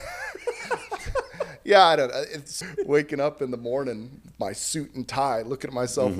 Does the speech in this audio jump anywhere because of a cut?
yes; 1 cut; at 2.5 s

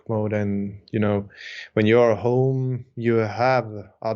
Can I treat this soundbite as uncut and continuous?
yes; 0 cuts

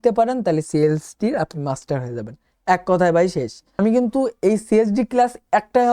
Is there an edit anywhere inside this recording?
yes; 1 cut; at 3.8 s

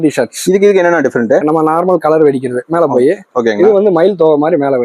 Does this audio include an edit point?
no; 0 cuts

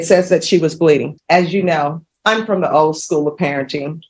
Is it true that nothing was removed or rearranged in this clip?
no; 2 cuts; at 1.1 s, 2.1 s

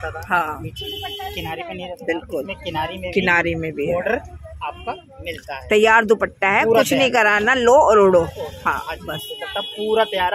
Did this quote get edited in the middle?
no; 0 cuts

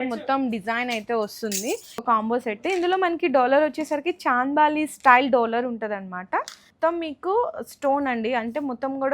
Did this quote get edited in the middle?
yes; 2 cuts; at 2.0 s, 6.7 s

